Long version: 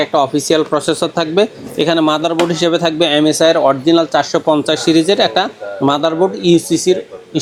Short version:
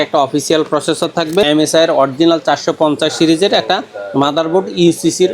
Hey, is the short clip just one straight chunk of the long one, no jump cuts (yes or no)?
no